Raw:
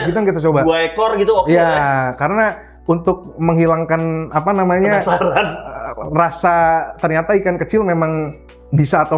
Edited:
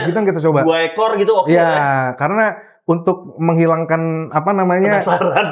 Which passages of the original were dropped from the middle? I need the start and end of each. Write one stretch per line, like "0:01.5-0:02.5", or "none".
none

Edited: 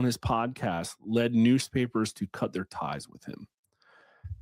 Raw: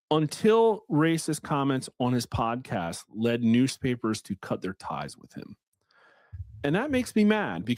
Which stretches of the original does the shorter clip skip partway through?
none

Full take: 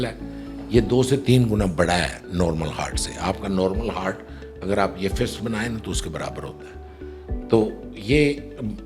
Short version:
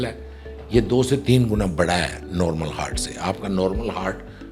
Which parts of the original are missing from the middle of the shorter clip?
none

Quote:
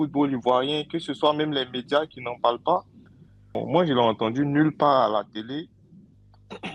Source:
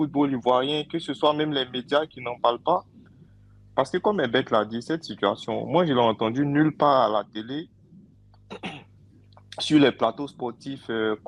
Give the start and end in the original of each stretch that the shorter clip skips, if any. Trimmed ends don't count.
0:03.5-0:05.5

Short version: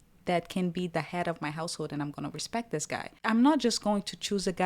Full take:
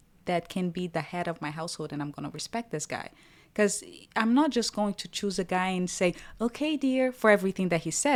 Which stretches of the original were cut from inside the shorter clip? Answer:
0:03.0-0:04.0

